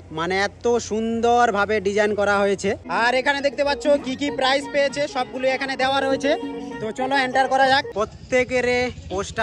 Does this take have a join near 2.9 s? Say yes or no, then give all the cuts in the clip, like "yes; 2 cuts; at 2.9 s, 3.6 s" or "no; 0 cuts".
yes; 2 cuts; at 2.9 s, 7.9 s